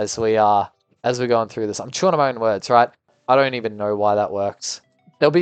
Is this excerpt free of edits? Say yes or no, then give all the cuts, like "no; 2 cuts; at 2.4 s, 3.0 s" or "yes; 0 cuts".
no; 1 cut; at 3.1 s